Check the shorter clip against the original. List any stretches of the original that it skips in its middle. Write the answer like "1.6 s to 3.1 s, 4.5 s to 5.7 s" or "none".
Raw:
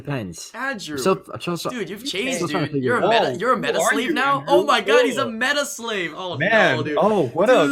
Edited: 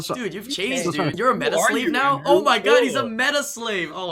2.7 s to 3.4 s